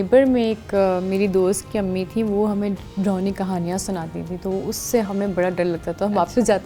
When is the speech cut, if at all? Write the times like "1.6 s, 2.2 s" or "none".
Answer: none